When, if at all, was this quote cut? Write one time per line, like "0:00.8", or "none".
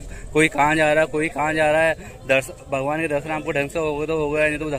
none